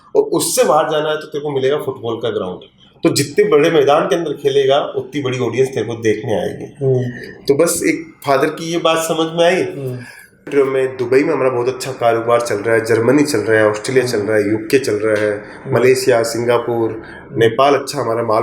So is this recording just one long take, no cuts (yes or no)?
no